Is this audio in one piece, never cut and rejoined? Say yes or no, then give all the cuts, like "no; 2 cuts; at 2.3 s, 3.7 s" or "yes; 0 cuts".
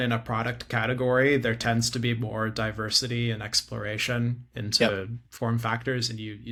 yes; 0 cuts